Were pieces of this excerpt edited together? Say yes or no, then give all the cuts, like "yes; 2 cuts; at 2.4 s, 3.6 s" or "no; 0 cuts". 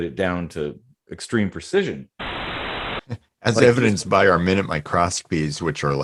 yes; 1 cut; at 2.7 s